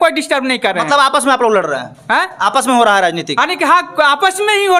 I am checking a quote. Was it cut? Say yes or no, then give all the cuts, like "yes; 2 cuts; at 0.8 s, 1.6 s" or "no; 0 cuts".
no; 0 cuts